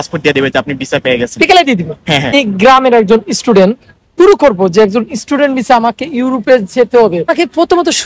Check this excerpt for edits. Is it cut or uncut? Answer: cut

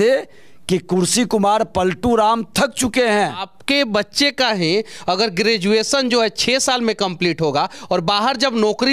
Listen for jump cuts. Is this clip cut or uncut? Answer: cut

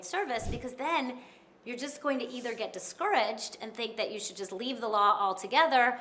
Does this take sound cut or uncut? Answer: uncut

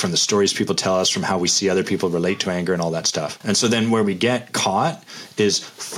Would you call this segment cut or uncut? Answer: cut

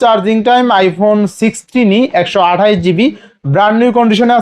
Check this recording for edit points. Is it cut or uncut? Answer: uncut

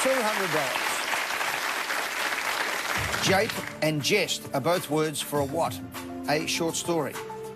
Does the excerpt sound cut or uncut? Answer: cut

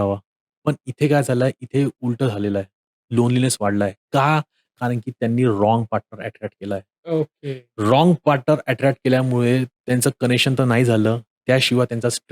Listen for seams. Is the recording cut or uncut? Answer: uncut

